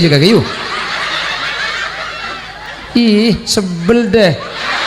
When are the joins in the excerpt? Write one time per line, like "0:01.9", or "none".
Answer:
0:02.7